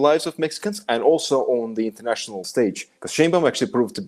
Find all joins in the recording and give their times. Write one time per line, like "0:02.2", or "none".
0:02.4

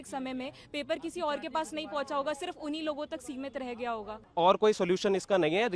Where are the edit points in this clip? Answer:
0:04.2

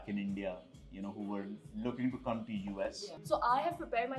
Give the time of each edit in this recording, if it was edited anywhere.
0:03.1

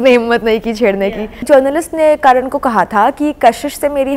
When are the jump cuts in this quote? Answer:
0:01.4

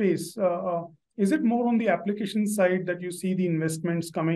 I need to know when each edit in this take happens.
none

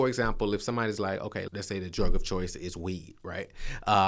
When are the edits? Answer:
0:01.5

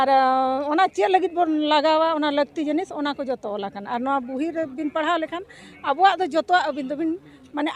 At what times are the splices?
none

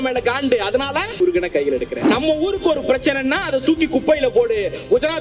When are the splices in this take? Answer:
0:01.1
0:02.1

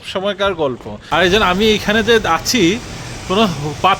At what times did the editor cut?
0:00.9

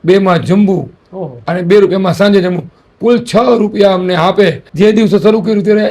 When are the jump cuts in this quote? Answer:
0:04.6

